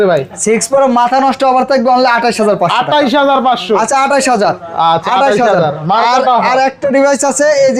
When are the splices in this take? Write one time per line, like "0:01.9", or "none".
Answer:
none